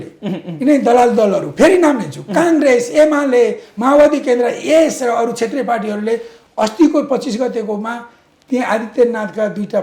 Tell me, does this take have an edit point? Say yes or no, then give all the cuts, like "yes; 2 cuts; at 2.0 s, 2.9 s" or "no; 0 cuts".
no; 0 cuts